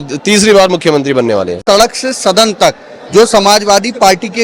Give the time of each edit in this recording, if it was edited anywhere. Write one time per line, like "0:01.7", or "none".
0:01.6